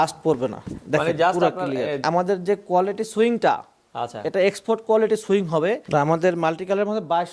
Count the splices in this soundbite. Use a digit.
2